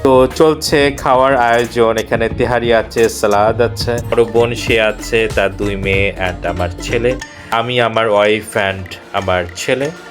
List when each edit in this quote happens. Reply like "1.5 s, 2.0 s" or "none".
4.1 s, 7.5 s